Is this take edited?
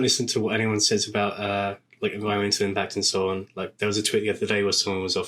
no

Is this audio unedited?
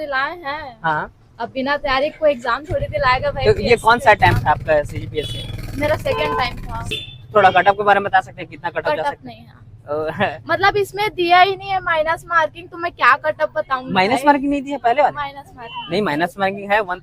no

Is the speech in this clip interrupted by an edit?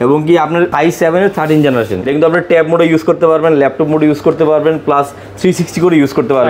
yes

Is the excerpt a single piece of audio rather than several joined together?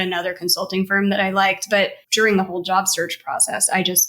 no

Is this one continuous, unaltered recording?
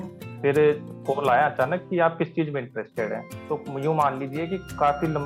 no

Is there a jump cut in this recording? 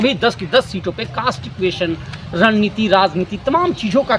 no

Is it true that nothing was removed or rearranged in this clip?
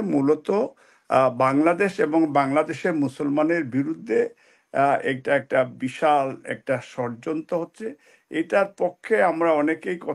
yes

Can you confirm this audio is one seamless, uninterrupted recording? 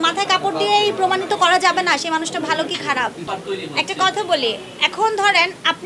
no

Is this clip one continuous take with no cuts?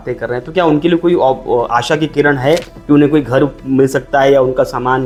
yes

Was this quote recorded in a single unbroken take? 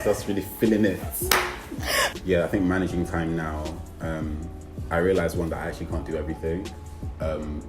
no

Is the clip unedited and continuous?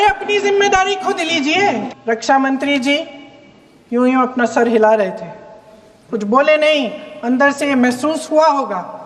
no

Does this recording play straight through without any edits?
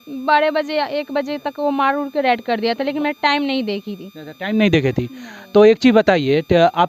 yes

